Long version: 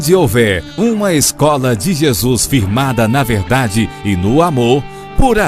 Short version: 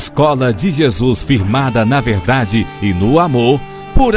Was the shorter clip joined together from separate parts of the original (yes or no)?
no